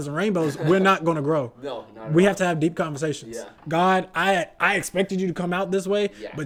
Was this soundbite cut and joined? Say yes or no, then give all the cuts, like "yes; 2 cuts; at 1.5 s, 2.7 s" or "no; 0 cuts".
no; 0 cuts